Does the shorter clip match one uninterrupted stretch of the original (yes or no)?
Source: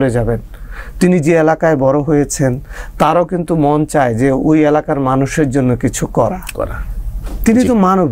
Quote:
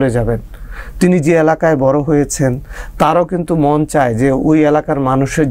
yes